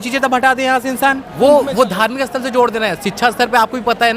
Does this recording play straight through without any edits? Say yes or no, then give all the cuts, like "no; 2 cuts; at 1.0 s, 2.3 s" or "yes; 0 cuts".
no; 1 cut; at 1.3 s